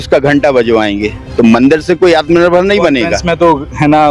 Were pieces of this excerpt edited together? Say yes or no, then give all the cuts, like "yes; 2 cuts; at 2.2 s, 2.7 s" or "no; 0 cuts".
yes; 2 cuts; at 1.2 s, 3.2 s